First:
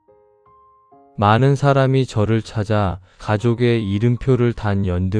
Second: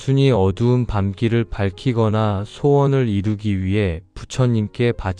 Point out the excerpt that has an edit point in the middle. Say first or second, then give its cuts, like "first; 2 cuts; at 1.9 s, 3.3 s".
first; 1 cut; at 1.1 s